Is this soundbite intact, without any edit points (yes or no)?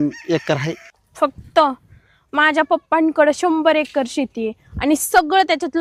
yes